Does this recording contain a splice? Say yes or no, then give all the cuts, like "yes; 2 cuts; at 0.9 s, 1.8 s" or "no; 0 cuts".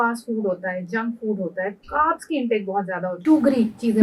yes; 1 cut; at 3.0 s